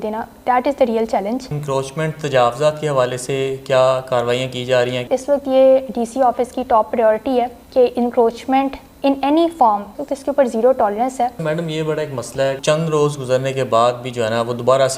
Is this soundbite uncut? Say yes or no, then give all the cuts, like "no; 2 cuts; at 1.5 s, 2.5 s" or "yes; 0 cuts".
no; 7 cuts; at 1.5 s, 5.0 s, 7.6 s, 8.8 s, 9.9 s, 11.4 s, 12.6 s